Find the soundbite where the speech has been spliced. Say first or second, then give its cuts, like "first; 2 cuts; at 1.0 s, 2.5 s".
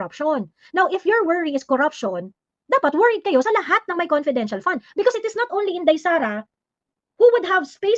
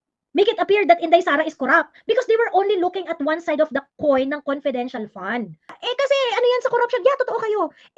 second; 1 cut; at 5.7 s